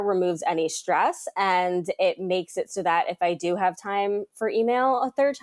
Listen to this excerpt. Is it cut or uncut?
uncut